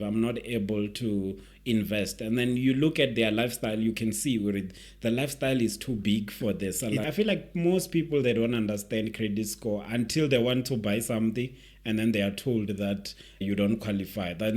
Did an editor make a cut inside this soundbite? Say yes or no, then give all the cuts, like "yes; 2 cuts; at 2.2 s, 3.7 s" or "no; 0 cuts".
yes; 2 cuts; at 7.1 s, 13.4 s